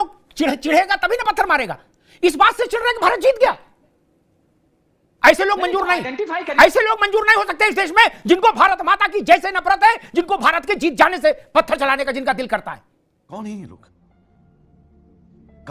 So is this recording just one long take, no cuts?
yes; 0 cuts

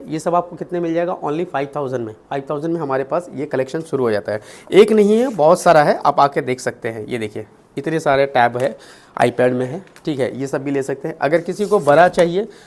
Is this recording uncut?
yes; 0 cuts

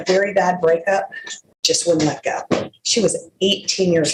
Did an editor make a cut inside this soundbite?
no; 0 cuts

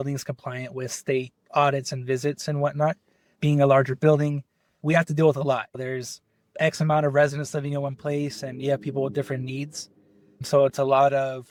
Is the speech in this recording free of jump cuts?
yes; 0 cuts

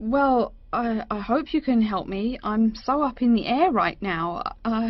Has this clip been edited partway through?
no; 0 cuts

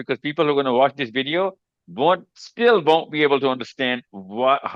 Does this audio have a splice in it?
no; 0 cuts

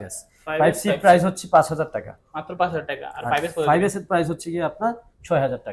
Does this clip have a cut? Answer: no; 0 cuts

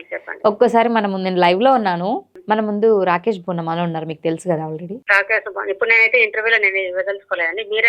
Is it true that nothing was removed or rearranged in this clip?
no; 2 cuts; at 2.3 s, 4.9 s

